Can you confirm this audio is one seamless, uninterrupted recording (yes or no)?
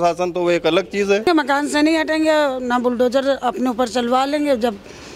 no